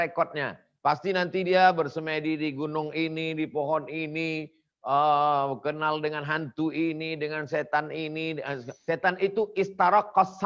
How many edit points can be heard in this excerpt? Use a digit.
1